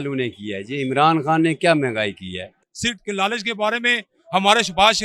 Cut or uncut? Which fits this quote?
cut